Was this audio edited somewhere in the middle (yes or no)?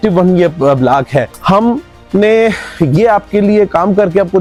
no